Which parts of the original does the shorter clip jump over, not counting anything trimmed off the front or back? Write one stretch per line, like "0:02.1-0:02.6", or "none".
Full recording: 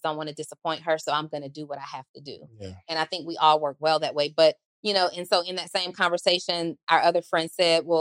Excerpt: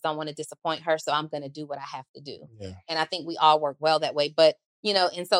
none